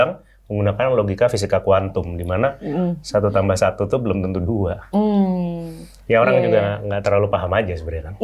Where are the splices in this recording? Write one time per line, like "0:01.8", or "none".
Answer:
none